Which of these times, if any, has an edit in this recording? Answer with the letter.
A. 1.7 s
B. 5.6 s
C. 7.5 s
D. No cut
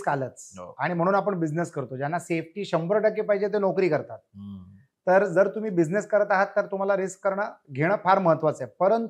D